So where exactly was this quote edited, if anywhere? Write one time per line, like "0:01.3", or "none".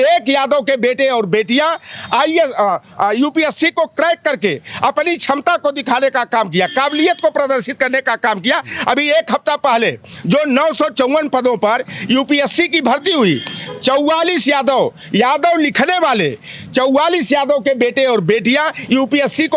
none